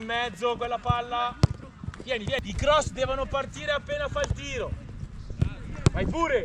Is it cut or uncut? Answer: cut